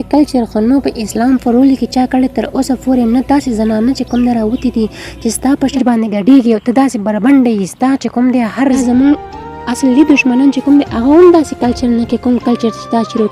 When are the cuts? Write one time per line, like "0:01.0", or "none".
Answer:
0:05.8
0:08.8